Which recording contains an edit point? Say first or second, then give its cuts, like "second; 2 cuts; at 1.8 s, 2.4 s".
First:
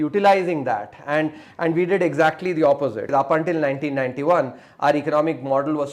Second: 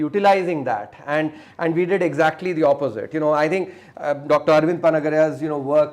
first; 1 cut; at 3.1 s